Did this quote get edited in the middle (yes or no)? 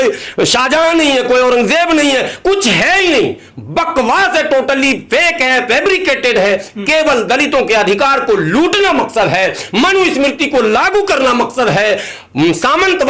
no